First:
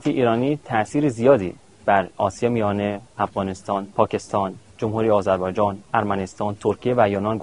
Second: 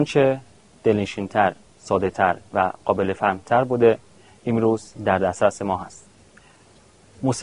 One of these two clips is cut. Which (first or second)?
first